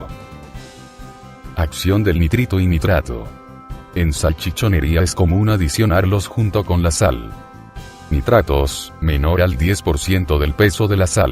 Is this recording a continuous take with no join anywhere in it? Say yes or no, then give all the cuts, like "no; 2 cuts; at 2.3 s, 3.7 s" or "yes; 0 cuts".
no; 1 cut; at 8.6 s